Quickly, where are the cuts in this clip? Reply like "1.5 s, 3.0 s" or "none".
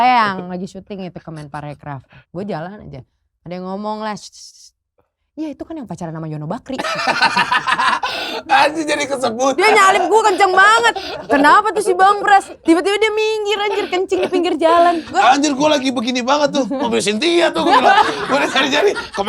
2.1 s, 9.6 s, 12.5 s, 15.1 s